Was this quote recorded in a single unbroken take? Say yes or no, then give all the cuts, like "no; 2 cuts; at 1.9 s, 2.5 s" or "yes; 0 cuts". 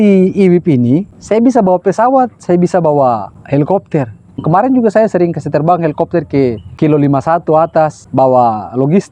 no; 5 cuts; at 1.1 s, 3.3 s, 4.3 s, 6.6 s, 8.0 s